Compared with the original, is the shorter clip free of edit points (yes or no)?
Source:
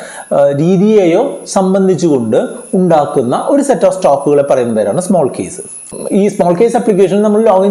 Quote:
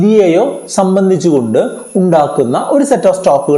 yes